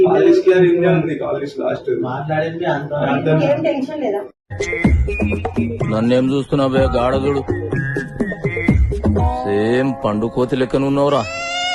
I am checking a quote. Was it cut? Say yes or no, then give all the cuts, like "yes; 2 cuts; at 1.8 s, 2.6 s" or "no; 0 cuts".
no; 0 cuts